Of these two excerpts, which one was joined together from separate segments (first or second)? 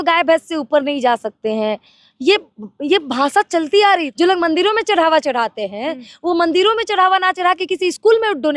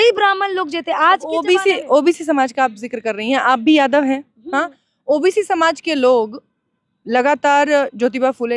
first